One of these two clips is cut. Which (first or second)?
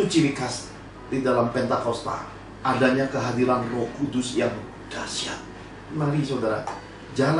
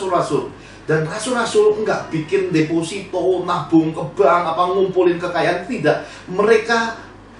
first